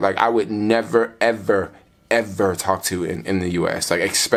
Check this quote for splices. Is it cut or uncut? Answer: uncut